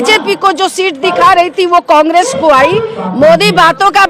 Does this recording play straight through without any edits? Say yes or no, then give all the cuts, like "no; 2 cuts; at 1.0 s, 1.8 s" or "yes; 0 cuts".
no; 1 cut; at 3.0 s